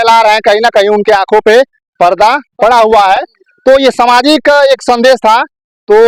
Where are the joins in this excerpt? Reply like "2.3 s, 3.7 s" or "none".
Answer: none